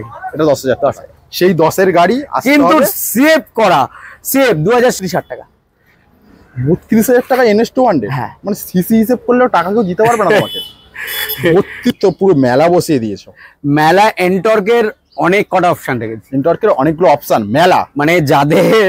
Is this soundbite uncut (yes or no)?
no